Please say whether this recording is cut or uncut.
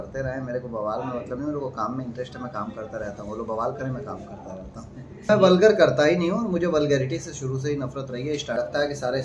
cut